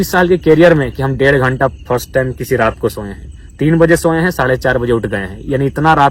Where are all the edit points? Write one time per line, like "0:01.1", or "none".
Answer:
none